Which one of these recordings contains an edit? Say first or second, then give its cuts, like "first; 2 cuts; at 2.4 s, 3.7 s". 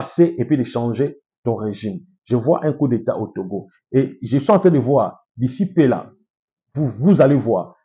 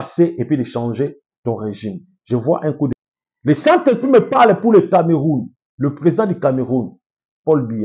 second; 1 cut; at 2.9 s